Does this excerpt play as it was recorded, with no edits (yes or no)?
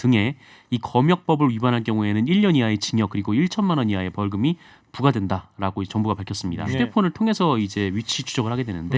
no